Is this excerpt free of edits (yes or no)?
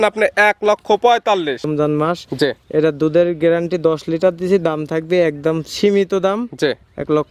no